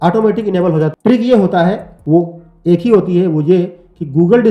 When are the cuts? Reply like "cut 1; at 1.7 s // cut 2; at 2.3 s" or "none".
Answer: cut 1; at 0.9 s